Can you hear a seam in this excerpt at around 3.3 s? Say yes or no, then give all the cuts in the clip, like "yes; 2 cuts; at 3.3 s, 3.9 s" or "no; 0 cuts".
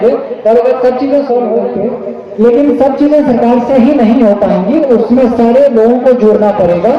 no; 1 cut; at 1.7 s